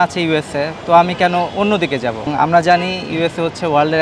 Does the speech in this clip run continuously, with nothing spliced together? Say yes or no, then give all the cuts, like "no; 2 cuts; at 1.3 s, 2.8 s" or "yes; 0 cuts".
no; 1 cut; at 2.3 s